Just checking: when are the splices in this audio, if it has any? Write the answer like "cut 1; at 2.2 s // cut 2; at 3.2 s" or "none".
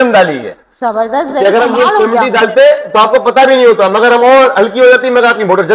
none